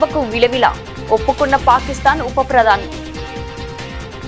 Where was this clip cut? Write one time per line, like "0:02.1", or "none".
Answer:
none